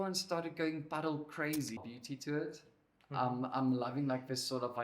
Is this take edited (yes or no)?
yes